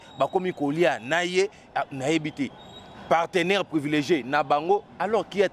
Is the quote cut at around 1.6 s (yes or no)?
no